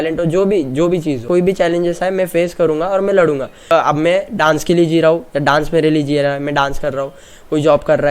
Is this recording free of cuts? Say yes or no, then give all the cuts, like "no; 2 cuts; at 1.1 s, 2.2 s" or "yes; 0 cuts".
no; 2 cuts; at 1.2 s, 3.7 s